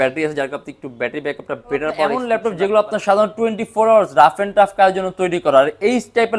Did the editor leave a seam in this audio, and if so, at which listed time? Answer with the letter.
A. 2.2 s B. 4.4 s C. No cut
A